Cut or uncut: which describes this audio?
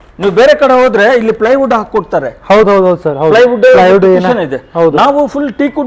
uncut